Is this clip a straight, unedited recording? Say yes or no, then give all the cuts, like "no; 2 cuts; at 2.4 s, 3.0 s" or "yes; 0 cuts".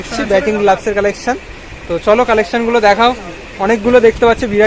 yes; 0 cuts